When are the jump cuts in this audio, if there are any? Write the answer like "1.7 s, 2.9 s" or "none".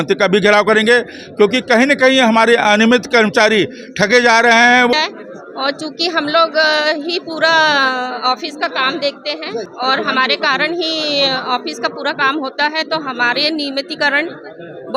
4.9 s, 9.7 s